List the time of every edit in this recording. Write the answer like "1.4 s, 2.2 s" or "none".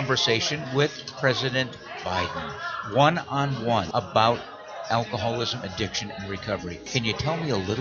3.9 s, 6.9 s